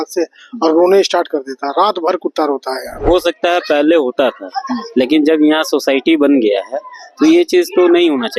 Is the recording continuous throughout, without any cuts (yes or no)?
no